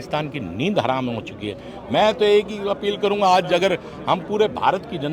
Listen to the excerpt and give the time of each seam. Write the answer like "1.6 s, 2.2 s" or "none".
none

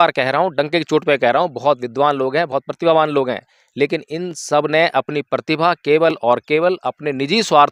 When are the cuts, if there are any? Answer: none

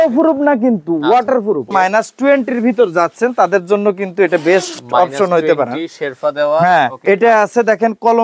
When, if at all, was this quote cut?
1.7 s, 7.0 s

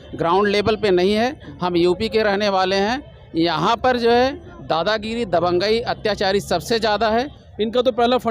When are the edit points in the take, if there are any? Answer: 7.4 s

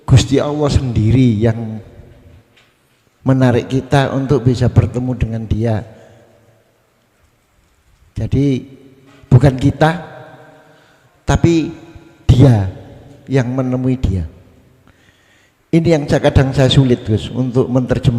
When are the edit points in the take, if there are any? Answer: none

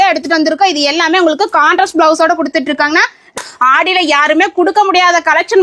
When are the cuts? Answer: 3.3 s

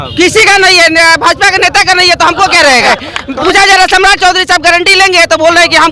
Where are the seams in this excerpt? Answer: 2.9 s

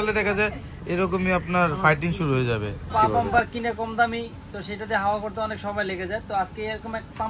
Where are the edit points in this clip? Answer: 2.9 s

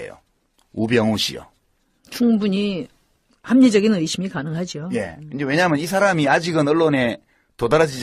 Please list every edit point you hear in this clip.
2.3 s

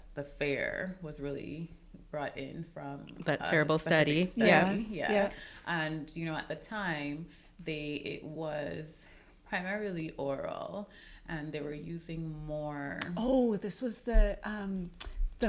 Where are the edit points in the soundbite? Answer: none

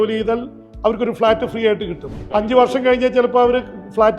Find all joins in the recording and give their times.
2.2 s

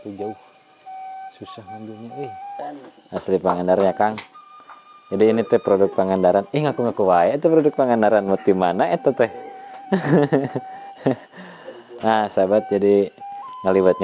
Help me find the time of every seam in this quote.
2.6 s

